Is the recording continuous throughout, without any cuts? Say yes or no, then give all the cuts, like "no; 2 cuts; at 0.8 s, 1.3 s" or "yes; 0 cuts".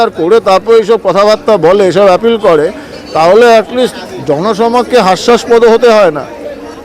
yes; 0 cuts